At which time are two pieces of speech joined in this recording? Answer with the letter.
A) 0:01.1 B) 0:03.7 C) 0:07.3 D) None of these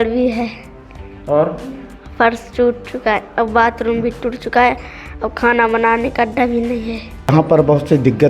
C